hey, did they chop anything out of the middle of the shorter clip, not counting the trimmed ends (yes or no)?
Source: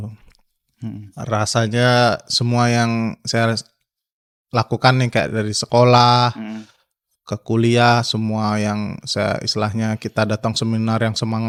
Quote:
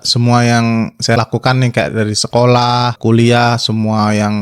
yes